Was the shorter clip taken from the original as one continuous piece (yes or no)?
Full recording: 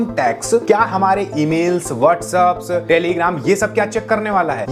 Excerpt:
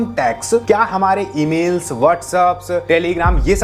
yes